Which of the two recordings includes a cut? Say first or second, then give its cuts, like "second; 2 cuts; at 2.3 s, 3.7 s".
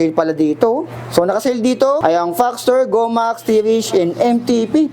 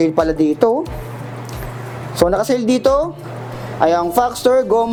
first; 2 cuts; at 1.0 s, 2.0 s